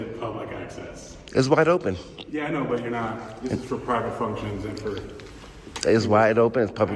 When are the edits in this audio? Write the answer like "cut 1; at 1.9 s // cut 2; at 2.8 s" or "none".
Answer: none

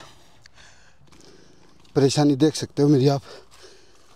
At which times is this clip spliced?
cut 1; at 0.9 s

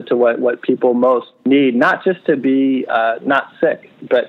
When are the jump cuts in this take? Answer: cut 1; at 1.3 s

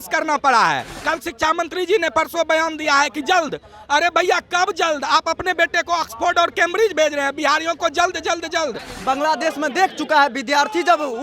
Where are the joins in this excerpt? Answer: cut 1; at 0.9 s // cut 2; at 8.9 s

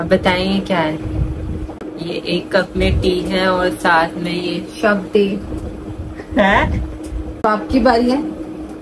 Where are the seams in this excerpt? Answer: cut 1; at 1.7 s // cut 2; at 7.4 s

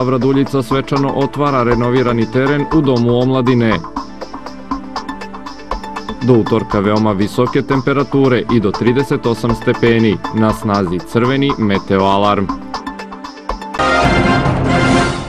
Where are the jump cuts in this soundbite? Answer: cut 1; at 13.8 s

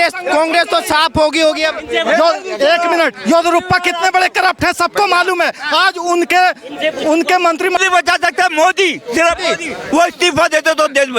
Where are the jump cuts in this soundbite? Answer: cut 1; at 7.8 s

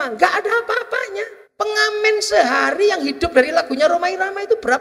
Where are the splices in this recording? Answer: cut 1; at 1.4 s

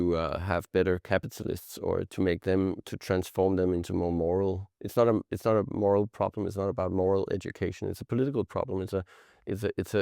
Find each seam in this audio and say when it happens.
cut 1; at 2.1 s

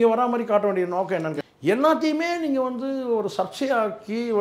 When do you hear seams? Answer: cut 1; at 1.3 s

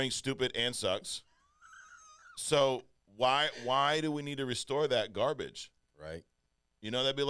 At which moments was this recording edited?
none

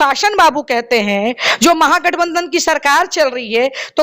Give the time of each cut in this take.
none

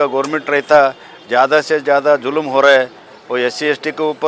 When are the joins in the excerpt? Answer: none

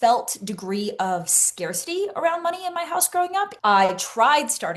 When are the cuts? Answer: cut 1; at 3.6 s

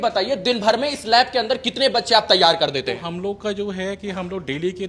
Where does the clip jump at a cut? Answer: none

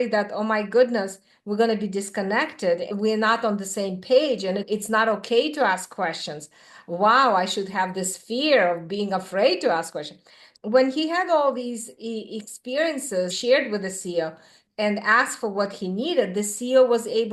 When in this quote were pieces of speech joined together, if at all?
cut 1; at 2.9 s // cut 2; at 4.6 s // cut 3; at 10.5 s // cut 4; at 13.4 s // cut 5; at 14.6 s

